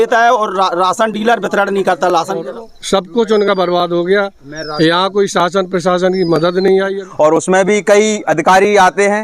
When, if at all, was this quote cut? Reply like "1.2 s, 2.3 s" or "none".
2.4 s, 7.0 s